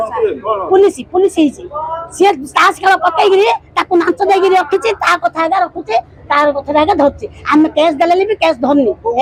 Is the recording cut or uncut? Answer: uncut